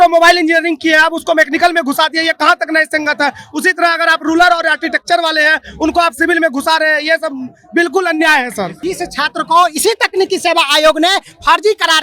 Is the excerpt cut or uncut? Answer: cut